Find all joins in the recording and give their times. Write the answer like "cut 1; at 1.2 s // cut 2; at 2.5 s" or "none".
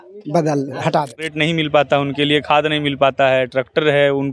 cut 1; at 1.3 s